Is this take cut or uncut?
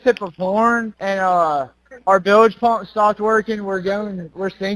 uncut